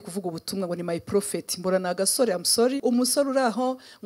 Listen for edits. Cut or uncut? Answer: cut